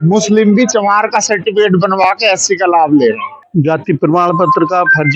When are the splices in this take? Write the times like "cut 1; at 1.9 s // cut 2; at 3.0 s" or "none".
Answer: cut 1; at 3.3 s